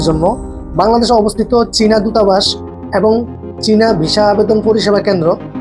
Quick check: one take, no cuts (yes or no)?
yes